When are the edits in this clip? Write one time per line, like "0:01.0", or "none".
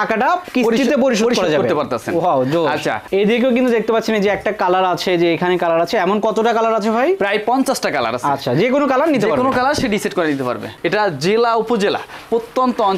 0:03.0
0:10.7